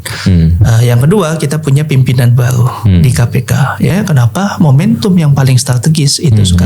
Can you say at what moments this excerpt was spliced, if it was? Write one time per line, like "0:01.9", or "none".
0:03.9